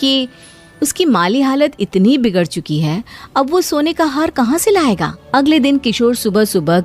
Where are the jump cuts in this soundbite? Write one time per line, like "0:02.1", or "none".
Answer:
0:05.1